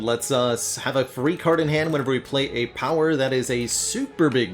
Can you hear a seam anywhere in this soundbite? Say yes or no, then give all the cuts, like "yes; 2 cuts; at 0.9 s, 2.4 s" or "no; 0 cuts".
no; 0 cuts